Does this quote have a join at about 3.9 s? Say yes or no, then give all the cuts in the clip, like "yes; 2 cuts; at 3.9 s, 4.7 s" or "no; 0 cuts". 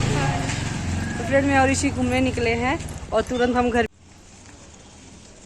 yes; 1 cut; at 3.9 s